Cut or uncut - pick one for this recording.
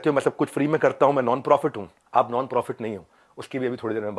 cut